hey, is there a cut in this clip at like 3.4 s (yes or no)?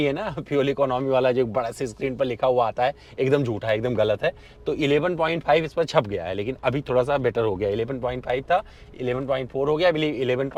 no